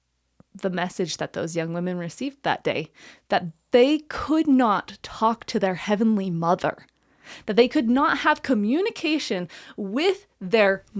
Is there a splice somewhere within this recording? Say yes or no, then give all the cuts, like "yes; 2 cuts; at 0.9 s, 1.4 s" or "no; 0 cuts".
no; 0 cuts